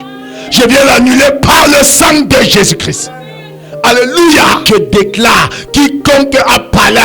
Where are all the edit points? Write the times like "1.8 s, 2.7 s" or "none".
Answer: 4.6 s